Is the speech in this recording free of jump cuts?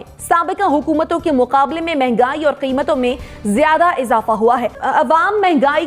no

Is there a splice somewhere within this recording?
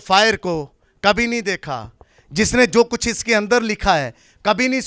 no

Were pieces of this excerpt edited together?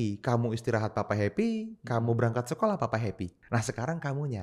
yes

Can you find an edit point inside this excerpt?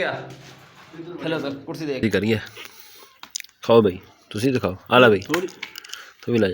yes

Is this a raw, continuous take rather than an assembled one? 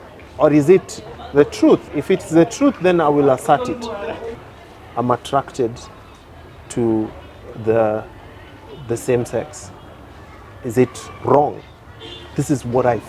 no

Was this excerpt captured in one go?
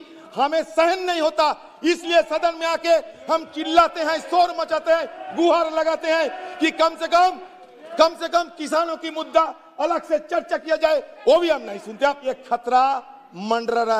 no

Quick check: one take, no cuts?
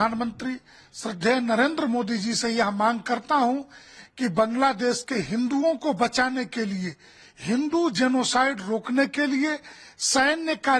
yes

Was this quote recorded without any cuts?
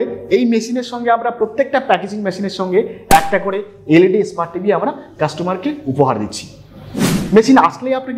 no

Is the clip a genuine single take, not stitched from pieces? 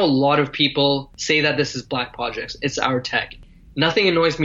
no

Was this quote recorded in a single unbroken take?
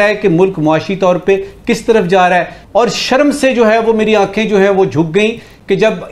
no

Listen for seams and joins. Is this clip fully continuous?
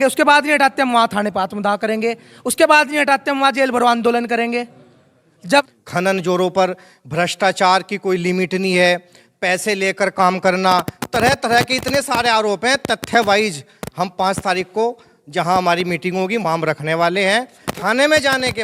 no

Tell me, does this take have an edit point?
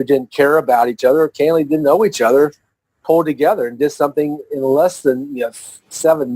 no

